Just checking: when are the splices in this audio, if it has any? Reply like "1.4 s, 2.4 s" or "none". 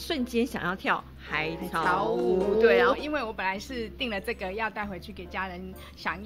3.0 s